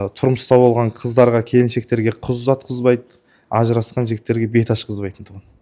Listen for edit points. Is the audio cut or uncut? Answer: uncut